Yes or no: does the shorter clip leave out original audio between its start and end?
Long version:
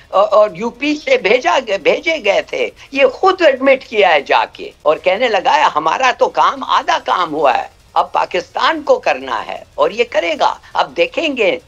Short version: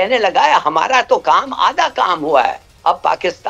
no